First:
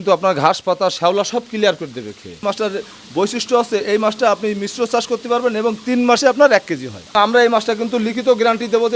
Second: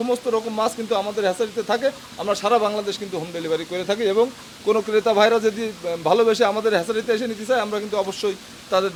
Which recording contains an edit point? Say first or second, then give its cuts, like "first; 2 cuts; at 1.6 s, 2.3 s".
first; 2 cuts; at 2.4 s, 7.1 s